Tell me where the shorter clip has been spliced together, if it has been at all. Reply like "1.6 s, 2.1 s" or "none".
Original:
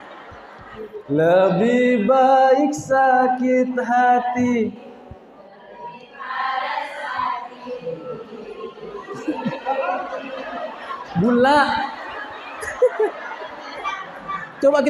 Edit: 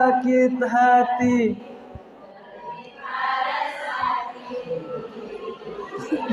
none